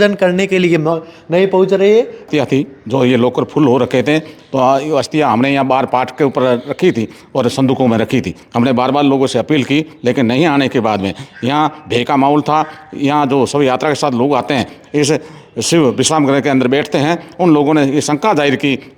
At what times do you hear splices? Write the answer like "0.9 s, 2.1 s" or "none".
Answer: 2.2 s